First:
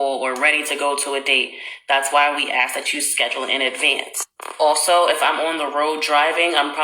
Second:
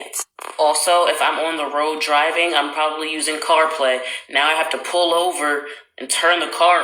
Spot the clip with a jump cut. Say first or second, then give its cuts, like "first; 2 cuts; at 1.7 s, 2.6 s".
first; 1 cut; at 2.1 s